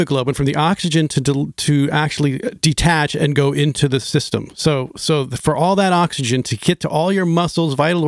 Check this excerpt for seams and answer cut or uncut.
uncut